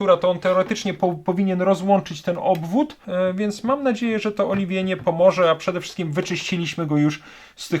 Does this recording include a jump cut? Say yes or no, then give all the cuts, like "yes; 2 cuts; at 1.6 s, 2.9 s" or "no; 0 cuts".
yes; 1 cut; at 3.0 s